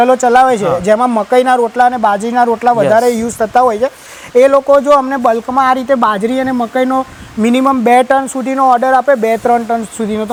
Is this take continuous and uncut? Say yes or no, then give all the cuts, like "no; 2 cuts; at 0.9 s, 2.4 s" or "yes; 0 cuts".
yes; 0 cuts